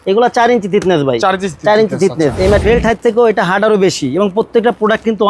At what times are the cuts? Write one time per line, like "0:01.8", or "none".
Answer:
0:02.6